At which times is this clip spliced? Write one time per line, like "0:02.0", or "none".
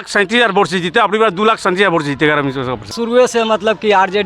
0:02.9